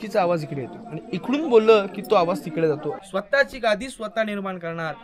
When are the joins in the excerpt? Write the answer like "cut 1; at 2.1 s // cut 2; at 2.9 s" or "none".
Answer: cut 1; at 3.0 s